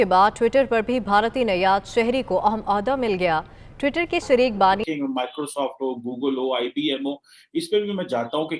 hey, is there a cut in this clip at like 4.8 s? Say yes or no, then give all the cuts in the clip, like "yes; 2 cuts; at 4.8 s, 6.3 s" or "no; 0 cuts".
yes; 1 cut; at 4.8 s